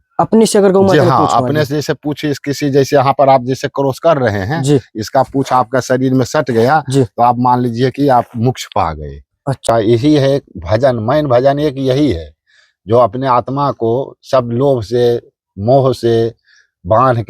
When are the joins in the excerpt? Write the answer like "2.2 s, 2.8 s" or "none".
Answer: 9.6 s